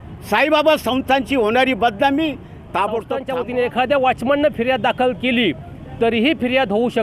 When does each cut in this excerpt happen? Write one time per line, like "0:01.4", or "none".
0:03.3